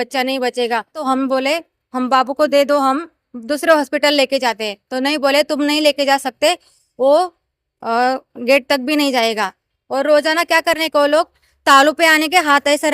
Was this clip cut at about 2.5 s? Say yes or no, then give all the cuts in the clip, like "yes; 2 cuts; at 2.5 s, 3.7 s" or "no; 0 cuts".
no; 1 cut; at 1.0 s